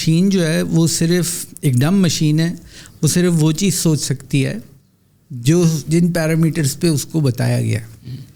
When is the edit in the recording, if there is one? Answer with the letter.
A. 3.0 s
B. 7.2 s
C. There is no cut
C